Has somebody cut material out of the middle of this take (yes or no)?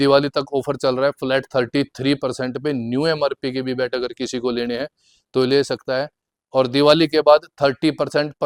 no